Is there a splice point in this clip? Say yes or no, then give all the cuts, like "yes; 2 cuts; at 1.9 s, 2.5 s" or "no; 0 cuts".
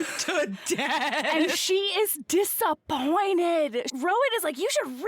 yes; 1 cut; at 3.9 s